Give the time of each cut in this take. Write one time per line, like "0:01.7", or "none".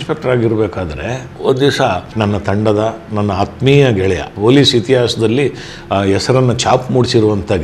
0:01.3
0:02.1
0:04.3

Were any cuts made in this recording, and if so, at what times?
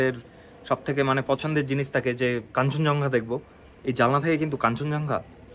none

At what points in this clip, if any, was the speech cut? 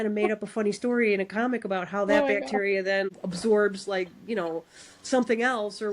0:03.1

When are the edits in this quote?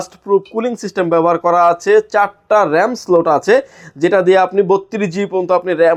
none

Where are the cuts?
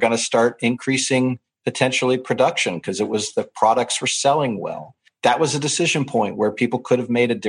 0:05.0

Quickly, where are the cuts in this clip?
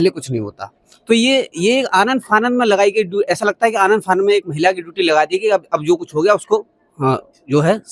none

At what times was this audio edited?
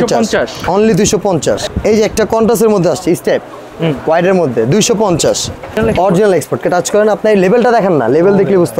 0:01.7
0:05.8

